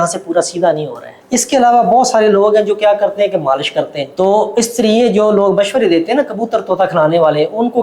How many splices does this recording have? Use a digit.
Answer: 2